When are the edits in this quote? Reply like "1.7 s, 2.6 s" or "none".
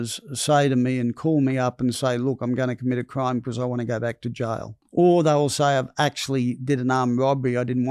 4.8 s